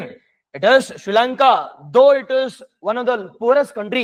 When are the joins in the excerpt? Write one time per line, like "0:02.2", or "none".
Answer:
none

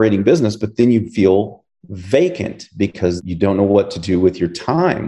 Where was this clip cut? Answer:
0:03.2

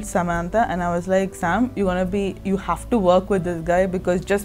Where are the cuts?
none

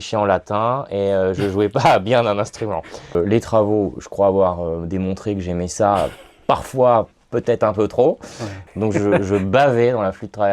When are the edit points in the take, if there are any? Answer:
0:03.2
0:08.6

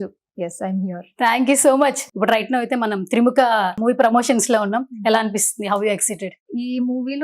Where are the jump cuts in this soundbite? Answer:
0:02.1
0:03.8
0:06.4

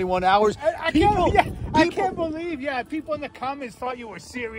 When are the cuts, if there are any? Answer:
none

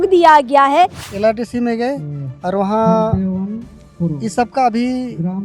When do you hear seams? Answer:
0:01.0

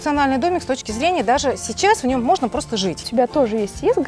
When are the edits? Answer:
0:03.1

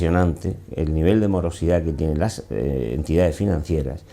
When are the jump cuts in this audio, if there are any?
0:02.5

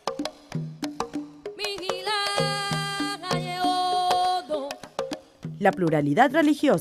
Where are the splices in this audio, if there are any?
0:04.5

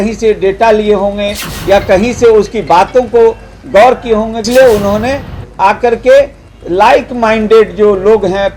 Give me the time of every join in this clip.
0:04.5

